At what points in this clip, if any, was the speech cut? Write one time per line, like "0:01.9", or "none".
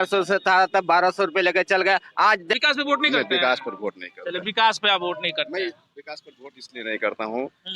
0:02.5